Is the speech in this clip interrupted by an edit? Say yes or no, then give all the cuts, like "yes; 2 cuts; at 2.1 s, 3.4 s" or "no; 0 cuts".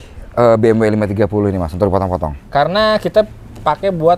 no; 0 cuts